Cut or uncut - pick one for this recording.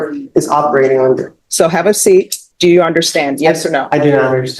cut